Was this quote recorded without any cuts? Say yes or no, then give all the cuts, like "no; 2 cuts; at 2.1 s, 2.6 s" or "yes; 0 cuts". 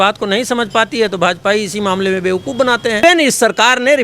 no; 1 cut; at 3.0 s